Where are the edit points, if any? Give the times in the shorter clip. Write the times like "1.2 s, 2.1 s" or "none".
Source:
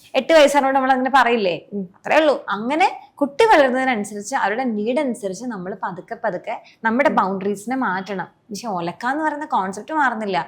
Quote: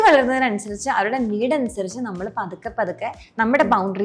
none